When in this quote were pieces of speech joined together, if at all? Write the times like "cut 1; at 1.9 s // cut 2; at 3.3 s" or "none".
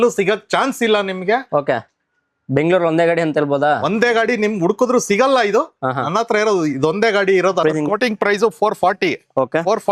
cut 1; at 7.6 s